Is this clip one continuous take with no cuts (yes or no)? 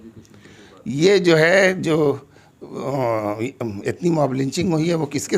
yes